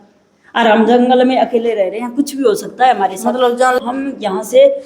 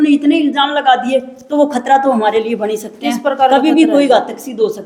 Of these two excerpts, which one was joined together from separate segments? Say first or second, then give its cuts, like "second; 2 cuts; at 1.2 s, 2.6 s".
first; 1 cut; at 3.8 s